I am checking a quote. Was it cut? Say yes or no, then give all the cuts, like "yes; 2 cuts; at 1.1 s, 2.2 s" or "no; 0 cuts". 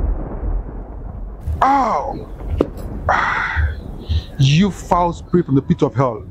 yes; 1 cut; at 1.4 s